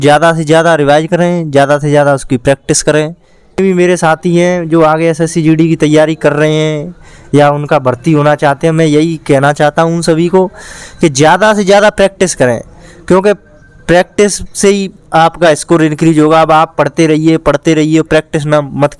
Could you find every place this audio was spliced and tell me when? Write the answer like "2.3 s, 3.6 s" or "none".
3.6 s